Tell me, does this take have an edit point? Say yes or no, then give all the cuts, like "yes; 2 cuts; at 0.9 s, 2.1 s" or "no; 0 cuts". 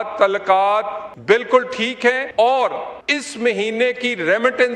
yes; 3 cuts; at 1.0 s, 2.2 s, 3.0 s